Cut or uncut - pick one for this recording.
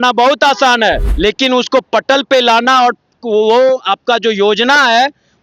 cut